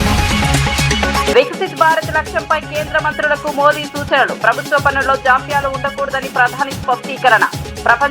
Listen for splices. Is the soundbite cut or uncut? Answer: cut